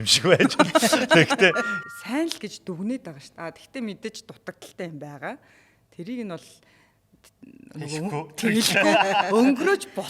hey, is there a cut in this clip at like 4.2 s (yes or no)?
no